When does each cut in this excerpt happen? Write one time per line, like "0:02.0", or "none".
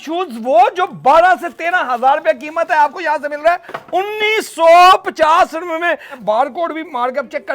0:06.1